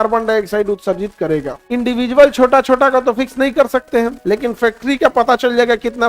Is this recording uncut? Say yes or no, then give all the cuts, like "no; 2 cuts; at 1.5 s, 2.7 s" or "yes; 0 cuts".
no; 2 cuts; at 1.6 s, 4.2 s